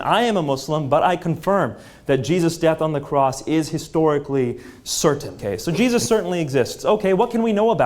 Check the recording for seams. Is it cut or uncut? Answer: cut